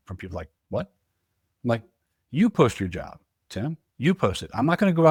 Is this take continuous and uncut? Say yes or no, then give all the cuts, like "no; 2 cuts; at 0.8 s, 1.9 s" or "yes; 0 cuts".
yes; 0 cuts